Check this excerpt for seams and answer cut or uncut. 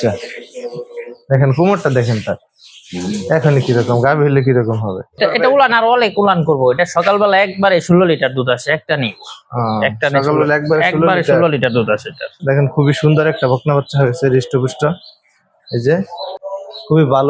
cut